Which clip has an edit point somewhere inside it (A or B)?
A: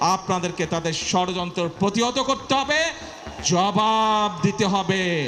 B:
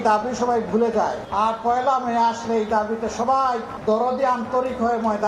B